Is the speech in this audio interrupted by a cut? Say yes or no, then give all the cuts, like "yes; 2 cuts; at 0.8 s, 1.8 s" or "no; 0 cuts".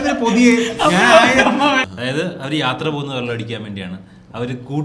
yes; 1 cut; at 1.8 s